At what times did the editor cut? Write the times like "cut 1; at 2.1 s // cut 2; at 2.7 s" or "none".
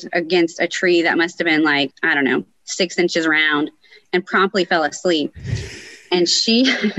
cut 1; at 2.0 s

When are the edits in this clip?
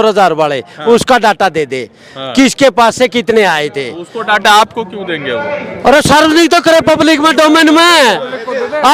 none

